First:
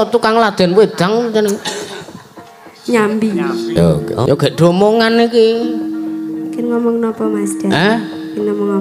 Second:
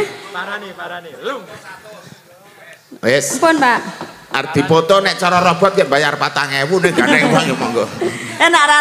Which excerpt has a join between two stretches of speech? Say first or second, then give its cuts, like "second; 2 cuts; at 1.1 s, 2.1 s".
first; 1 cut; at 3.8 s